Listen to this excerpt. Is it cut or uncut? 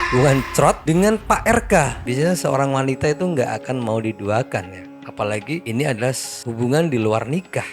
cut